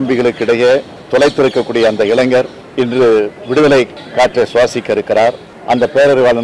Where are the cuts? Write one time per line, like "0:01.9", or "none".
0:00.9
0:02.6
0:04.0
0:05.5